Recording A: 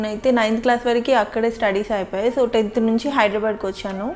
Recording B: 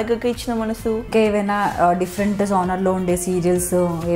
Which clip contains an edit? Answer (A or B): B